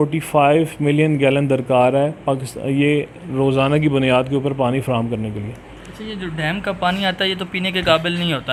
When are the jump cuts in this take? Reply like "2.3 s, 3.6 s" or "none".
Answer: none